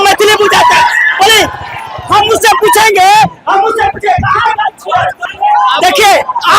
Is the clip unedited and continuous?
no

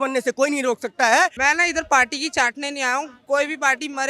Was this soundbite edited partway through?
yes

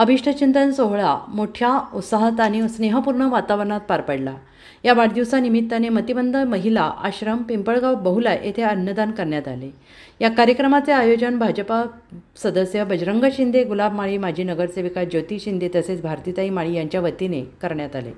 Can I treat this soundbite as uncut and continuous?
yes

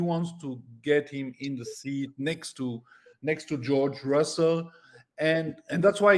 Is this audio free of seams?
yes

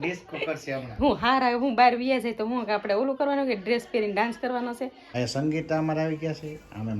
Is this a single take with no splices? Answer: no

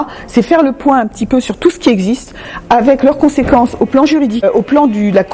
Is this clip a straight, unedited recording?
no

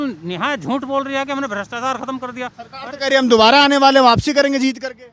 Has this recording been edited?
no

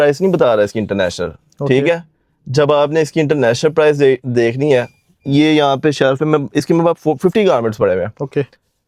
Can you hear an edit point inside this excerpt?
no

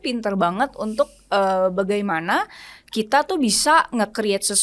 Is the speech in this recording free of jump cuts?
yes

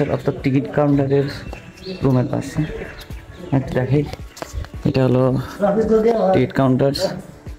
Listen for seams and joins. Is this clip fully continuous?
yes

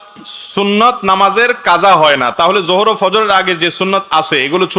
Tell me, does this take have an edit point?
no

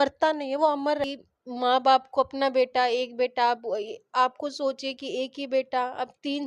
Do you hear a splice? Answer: yes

